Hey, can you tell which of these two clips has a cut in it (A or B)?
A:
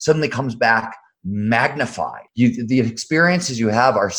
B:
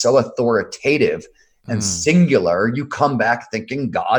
A